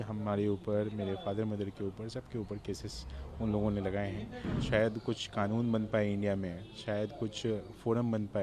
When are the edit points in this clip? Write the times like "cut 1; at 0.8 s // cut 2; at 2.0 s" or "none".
cut 1; at 4.6 s